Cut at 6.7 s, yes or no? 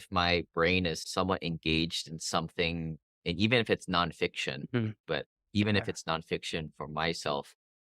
no